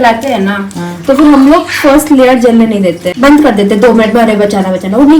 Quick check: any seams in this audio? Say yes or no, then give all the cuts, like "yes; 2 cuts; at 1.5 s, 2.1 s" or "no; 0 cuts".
yes; 1 cut; at 3.1 s